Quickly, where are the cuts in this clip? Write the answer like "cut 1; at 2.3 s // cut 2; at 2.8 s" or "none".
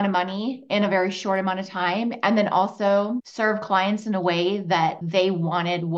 cut 1; at 5.0 s